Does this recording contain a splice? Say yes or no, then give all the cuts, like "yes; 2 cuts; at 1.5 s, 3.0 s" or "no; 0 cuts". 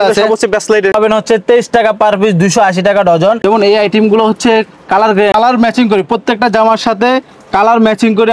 yes; 3 cuts; at 0.9 s, 3.4 s, 5.3 s